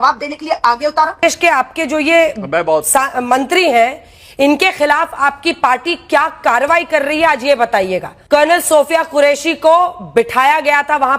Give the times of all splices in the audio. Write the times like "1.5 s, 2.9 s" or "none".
1.2 s, 8.1 s